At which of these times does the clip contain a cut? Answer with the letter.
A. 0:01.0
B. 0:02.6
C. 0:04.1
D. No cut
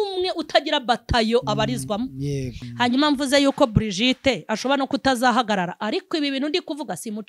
B